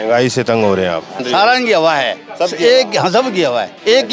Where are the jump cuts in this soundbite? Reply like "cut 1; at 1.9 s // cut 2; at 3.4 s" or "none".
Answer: cut 1; at 1.2 s